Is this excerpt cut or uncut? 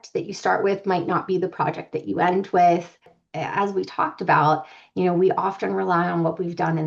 cut